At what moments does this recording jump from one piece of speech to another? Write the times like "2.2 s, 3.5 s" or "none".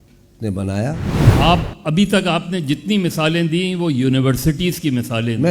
1.2 s